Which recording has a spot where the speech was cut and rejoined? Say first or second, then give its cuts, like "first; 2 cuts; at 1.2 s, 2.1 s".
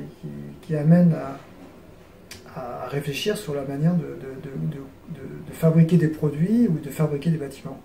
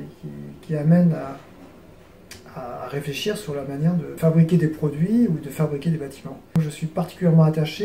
second; 2 cuts; at 4.1 s, 6.6 s